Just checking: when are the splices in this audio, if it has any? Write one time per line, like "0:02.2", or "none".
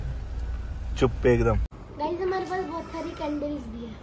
0:01.7